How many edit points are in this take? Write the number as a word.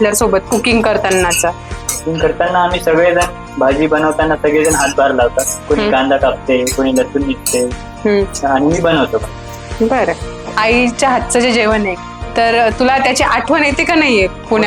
one